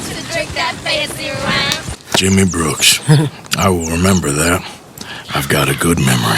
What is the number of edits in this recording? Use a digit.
1